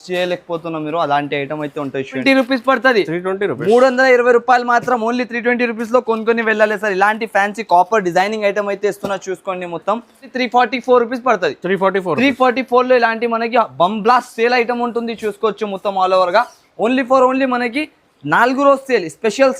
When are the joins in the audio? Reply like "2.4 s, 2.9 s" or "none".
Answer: 2.2 s, 10.3 s